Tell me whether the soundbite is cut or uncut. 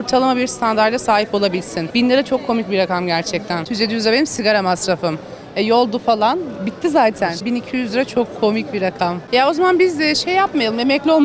cut